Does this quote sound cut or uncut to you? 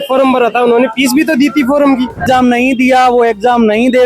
cut